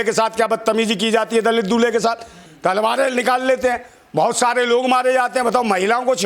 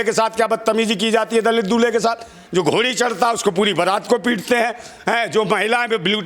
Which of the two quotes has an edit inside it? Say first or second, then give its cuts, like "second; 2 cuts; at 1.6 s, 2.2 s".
second; 1 cut; at 2.4 s